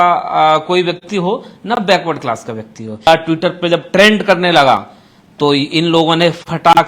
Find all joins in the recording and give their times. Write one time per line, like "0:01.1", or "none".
0:03.1